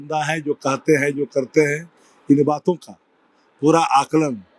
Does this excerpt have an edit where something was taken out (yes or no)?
no